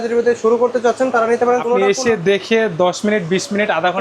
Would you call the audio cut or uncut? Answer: cut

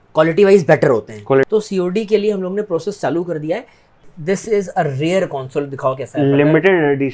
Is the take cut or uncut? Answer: cut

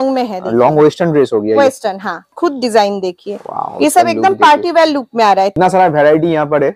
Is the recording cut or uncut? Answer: cut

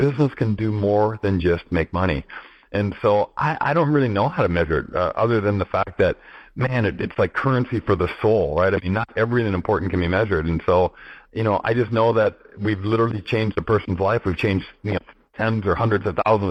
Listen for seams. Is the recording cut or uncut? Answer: uncut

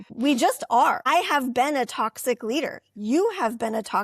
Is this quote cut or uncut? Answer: cut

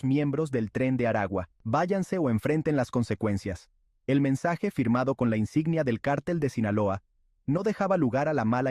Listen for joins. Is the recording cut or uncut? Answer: cut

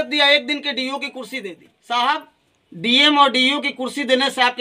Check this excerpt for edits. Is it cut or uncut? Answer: cut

